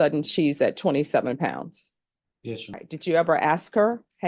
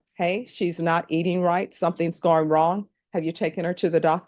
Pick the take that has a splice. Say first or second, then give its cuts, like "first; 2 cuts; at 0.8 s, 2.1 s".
first; 1 cut; at 2.7 s